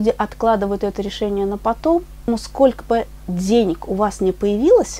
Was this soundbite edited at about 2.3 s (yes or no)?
yes